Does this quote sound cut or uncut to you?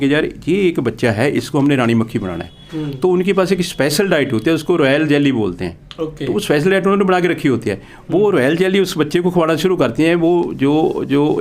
uncut